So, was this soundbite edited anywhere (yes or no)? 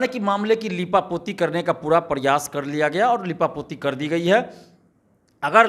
no